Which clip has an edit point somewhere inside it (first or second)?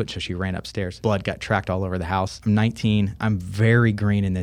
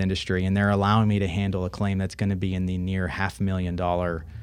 first